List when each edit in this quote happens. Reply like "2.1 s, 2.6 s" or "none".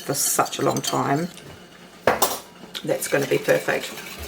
1.5 s